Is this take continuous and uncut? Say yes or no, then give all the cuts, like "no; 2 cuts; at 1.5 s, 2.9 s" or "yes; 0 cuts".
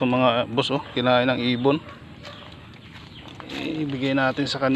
yes; 0 cuts